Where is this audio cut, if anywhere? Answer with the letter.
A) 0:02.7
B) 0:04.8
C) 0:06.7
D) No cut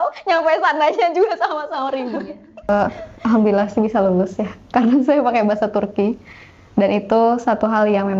A